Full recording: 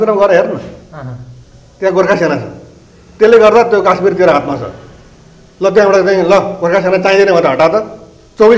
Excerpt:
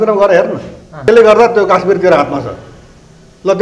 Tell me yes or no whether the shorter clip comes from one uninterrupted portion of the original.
no